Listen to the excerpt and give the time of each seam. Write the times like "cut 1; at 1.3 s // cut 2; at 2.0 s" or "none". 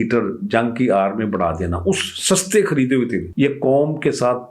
cut 1; at 3.2 s